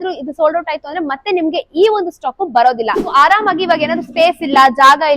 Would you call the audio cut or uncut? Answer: cut